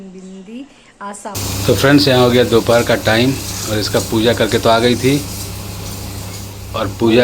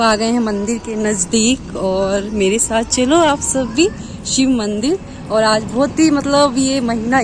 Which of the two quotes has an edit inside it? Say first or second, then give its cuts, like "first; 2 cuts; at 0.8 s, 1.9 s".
first; 1 cut; at 1.4 s